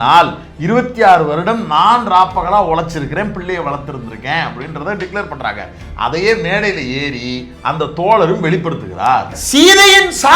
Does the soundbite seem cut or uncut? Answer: cut